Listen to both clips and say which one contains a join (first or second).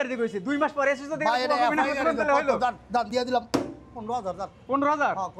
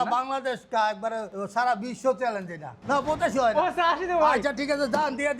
second